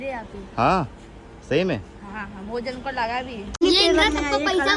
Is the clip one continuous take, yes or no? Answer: no